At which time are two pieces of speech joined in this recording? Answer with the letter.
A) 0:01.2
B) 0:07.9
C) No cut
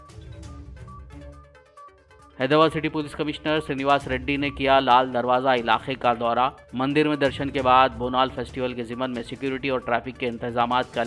A